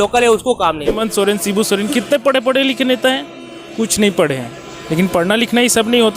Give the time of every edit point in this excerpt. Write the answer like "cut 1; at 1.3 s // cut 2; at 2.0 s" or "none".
cut 1; at 1.0 s